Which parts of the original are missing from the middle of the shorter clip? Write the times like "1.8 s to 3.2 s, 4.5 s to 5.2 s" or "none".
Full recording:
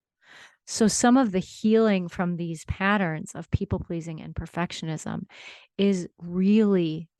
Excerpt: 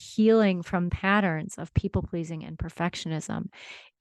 2.4 s to 2.7 s